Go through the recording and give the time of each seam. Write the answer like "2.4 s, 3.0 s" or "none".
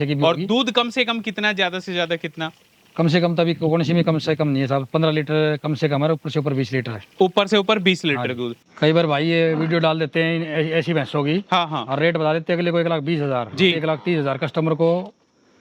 8.6 s

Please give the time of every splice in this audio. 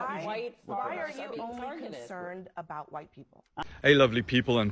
3.6 s

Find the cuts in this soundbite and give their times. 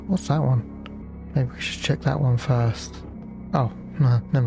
1.0 s, 3.1 s

